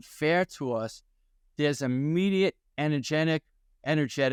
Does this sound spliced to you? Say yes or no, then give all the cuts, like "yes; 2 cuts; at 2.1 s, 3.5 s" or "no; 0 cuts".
no; 0 cuts